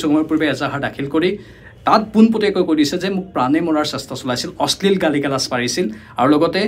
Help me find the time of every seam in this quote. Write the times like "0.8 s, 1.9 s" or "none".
none